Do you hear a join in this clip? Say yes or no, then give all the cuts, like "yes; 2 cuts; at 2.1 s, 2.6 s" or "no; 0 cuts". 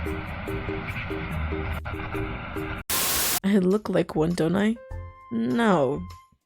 yes; 1 cut; at 2.8 s